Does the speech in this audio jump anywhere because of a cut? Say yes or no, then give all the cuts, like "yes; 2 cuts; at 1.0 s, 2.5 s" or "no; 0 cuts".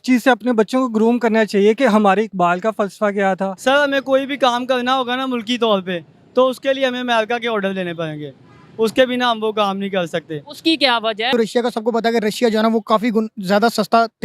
yes; 2 cuts; at 3.5 s, 11.3 s